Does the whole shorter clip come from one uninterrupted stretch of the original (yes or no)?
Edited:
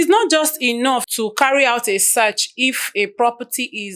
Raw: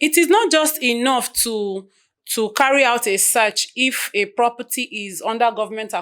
no